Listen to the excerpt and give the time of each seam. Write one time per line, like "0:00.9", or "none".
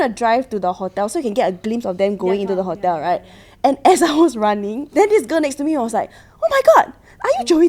0:04.8

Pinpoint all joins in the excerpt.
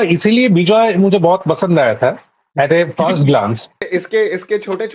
0:03.7

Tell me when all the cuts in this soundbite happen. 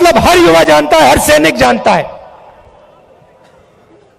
none

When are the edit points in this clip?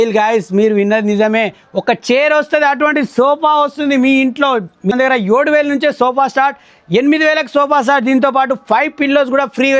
0:04.9

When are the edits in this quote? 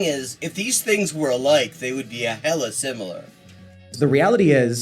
0:03.9

